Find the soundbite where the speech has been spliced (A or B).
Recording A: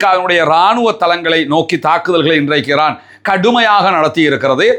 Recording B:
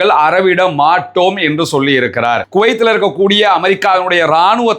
B